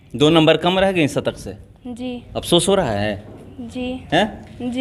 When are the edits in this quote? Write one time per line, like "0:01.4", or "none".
none